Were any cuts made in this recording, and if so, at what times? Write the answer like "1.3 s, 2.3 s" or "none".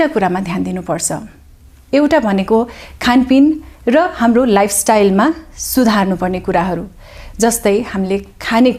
none